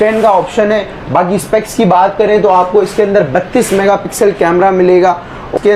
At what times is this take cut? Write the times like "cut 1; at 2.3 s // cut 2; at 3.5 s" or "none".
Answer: none

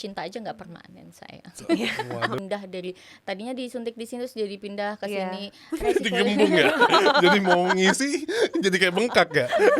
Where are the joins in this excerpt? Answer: cut 1; at 2.4 s

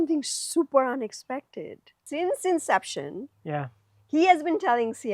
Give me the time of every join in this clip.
cut 1; at 2.0 s

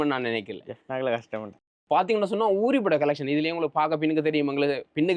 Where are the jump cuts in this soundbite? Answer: cut 1; at 1.7 s

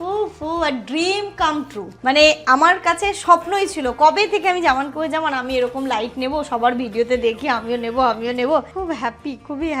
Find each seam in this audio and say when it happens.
cut 1; at 1.8 s // cut 2; at 8.7 s

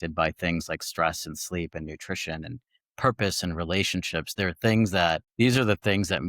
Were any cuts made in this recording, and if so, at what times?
cut 1; at 5.3 s

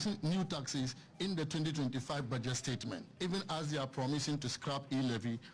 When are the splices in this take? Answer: cut 1; at 3.1 s

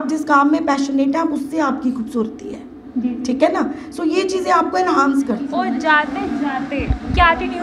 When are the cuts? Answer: cut 1; at 5.5 s

